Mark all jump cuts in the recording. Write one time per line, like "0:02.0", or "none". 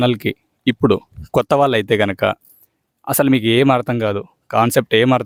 none